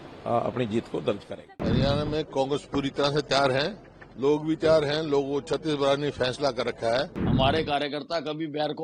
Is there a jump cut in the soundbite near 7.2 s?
yes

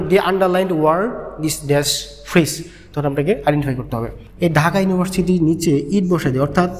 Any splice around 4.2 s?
yes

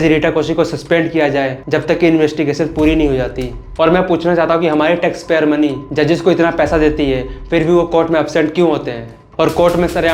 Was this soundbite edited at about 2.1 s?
no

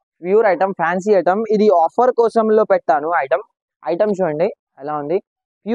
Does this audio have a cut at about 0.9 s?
no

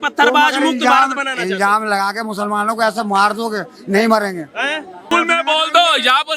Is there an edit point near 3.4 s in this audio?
no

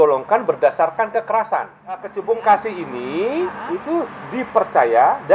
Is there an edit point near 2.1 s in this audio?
yes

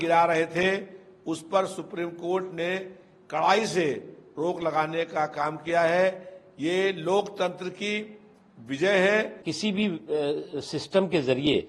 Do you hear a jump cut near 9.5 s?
yes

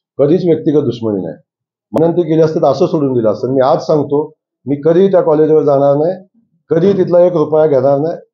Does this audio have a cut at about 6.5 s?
no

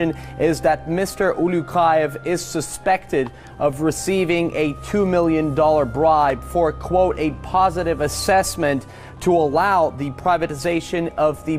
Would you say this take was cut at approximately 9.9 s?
yes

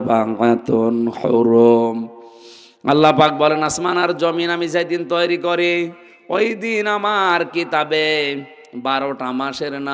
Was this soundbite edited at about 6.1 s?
no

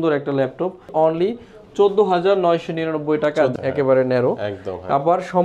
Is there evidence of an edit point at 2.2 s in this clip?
no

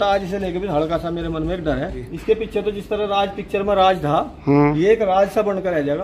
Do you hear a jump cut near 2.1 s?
yes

